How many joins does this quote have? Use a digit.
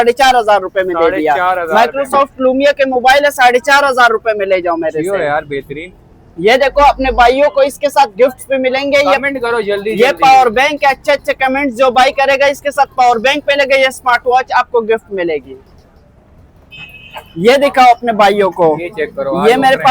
0